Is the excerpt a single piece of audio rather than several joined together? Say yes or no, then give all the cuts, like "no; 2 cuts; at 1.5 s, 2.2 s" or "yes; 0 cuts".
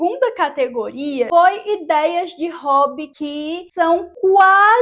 no; 2 cuts; at 1.3 s, 3.1 s